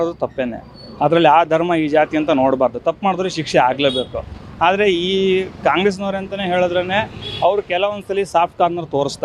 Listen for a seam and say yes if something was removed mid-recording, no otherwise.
no